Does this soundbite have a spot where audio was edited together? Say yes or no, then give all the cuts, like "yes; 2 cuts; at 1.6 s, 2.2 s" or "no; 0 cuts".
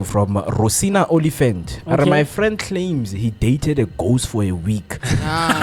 no; 0 cuts